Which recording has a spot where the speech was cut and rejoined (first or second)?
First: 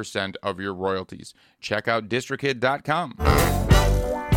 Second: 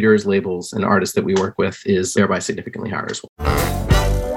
second